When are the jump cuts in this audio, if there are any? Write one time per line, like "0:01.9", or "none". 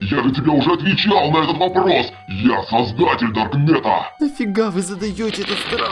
0:04.1